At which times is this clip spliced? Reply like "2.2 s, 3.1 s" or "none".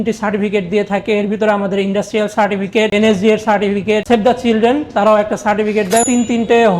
4.0 s, 6.0 s